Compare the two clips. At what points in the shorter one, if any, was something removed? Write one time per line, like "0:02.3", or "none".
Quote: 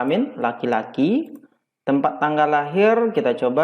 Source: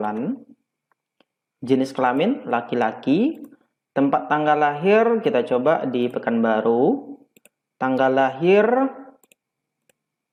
none

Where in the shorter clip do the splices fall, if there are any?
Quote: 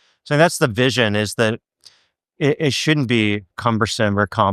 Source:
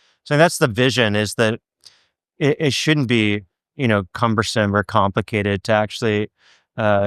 0:03.5

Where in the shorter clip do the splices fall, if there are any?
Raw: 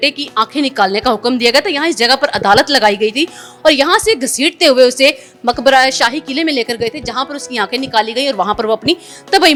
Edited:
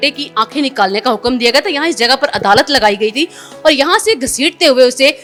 none

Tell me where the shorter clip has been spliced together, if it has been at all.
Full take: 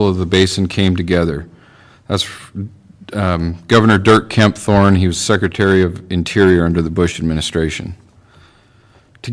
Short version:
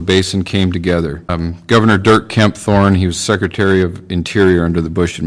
0:01.3

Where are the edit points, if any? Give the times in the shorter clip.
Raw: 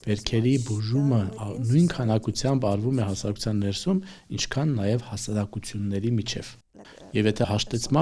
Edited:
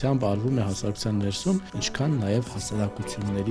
0:01.8

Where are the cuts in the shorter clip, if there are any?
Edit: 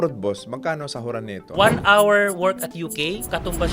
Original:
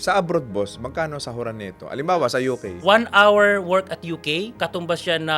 0:01.4

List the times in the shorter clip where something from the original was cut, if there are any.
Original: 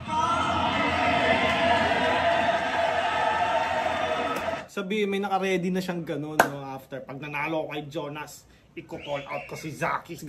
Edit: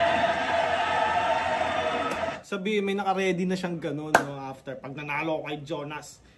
none

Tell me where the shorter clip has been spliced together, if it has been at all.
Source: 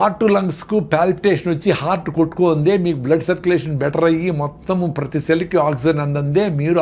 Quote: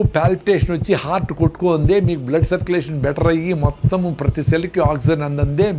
none

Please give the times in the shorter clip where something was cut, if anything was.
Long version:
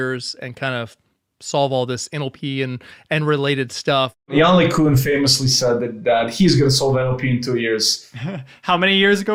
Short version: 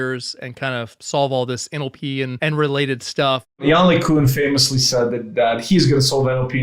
0:01.0
0:02.3

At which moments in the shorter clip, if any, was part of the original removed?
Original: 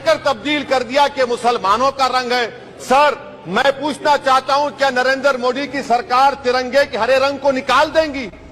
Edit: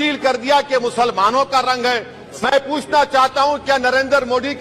0:02.2

